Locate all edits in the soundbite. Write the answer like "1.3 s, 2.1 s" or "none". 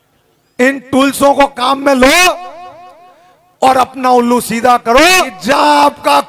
5.4 s